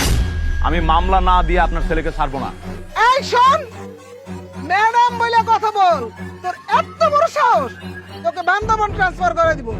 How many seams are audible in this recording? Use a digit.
1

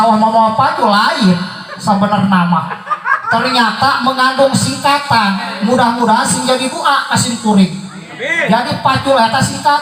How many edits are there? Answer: 0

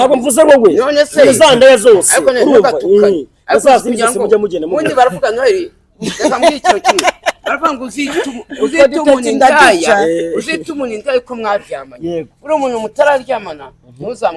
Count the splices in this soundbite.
0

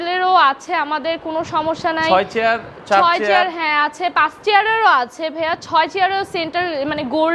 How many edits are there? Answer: 0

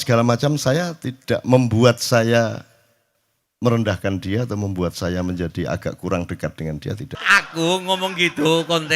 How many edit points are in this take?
1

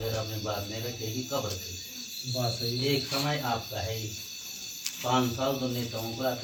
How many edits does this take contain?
0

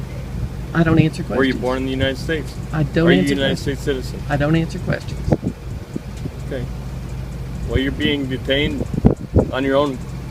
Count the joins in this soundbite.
0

